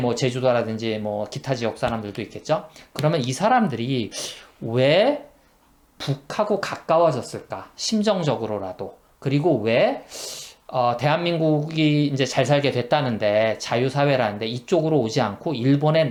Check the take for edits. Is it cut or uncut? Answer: uncut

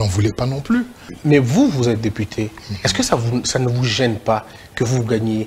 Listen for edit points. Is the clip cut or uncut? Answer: cut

